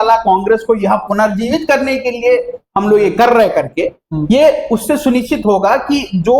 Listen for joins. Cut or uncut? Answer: uncut